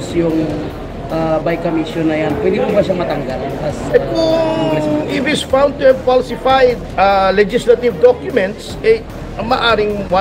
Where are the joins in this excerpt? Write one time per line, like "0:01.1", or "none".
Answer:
0:06.8